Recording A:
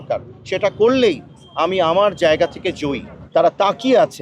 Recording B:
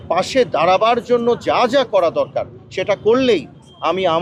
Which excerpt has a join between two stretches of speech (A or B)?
A